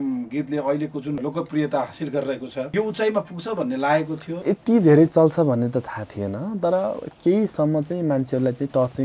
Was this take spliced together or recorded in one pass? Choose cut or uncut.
cut